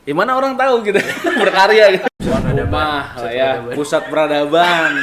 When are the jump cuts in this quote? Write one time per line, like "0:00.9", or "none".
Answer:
0:02.0